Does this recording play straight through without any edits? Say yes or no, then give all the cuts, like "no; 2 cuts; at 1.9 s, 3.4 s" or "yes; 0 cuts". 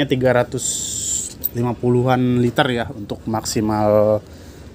yes; 0 cuts